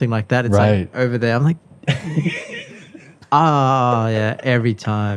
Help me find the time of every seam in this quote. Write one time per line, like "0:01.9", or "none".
none